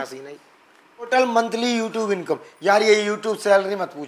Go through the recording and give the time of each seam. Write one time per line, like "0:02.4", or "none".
0:01.1